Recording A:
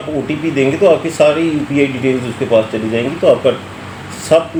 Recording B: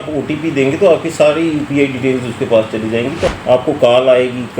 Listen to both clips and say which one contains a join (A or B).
B